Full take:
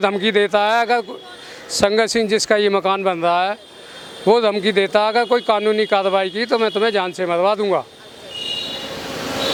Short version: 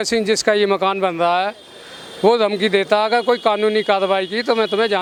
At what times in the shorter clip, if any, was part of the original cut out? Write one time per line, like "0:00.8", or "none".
none